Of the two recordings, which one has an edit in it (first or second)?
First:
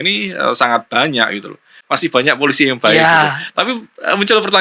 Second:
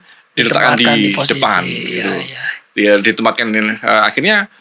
first